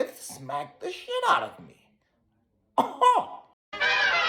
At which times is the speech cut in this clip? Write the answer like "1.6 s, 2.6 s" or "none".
3.3 s